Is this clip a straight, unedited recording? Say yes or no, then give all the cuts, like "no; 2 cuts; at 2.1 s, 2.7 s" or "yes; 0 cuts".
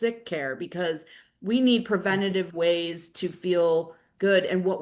yes; 0 cuts